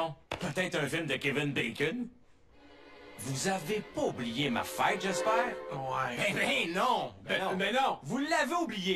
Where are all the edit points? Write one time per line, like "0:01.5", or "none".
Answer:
0:03.5